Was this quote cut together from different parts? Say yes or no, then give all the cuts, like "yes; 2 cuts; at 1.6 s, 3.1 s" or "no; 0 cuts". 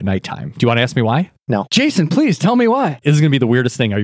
yes; 2 cuts; at 1.7 s, 3.0 s